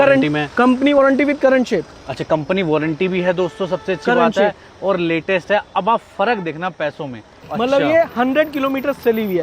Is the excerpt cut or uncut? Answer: cut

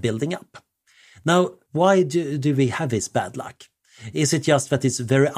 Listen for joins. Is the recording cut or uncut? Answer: cut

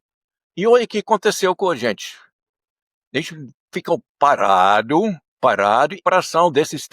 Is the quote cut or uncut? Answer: cut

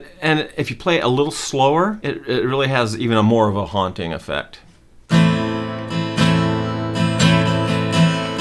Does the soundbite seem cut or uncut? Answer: cut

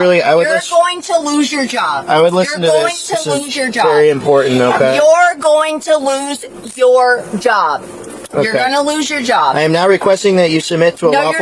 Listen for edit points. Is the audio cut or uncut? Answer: uncut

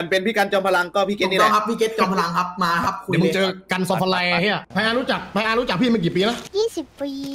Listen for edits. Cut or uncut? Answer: cut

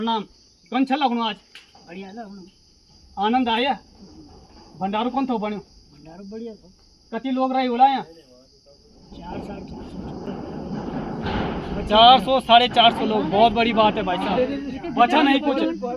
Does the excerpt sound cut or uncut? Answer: uncut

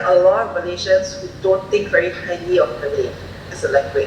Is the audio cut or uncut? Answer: uncut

